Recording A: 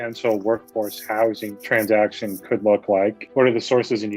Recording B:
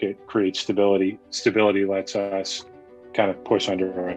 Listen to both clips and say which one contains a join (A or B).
A